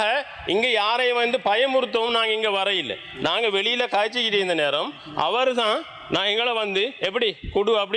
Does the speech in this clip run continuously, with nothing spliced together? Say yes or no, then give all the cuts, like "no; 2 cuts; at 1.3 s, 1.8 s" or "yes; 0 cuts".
yes; 0 cuts